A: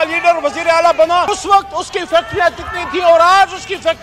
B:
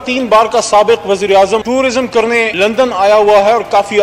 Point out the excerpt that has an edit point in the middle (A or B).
A